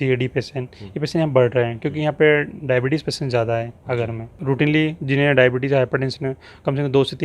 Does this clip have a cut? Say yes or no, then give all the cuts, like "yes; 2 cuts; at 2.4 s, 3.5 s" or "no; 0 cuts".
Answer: yes; 1 cut; at 4.4 s